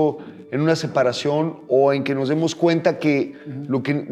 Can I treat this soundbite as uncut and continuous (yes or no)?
yes